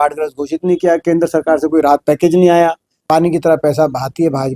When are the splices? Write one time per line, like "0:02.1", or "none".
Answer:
0:03.0